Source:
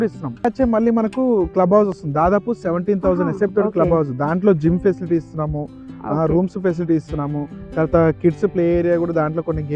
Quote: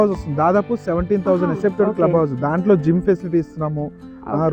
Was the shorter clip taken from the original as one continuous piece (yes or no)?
yes